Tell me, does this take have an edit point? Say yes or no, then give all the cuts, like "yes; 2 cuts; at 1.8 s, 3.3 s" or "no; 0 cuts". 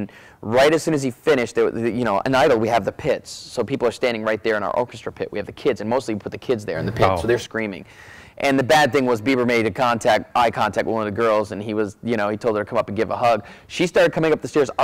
no; 0 cuts